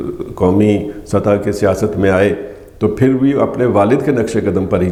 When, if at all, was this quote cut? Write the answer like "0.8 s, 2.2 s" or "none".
none

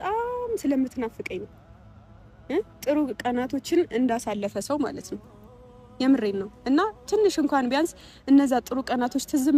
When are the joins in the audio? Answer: none

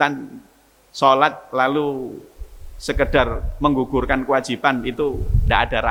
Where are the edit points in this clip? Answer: none

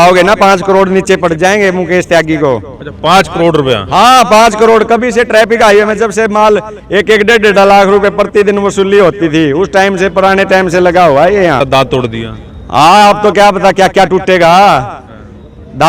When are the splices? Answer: 11.6 s

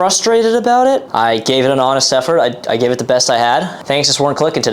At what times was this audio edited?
1.1 s, 3.7 s

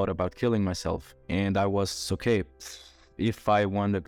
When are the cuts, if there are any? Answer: 1.1 s

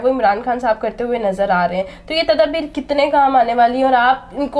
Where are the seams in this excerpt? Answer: none

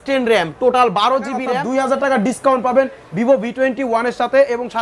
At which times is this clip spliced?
1.6 s

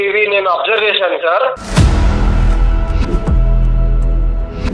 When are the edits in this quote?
1.6 s

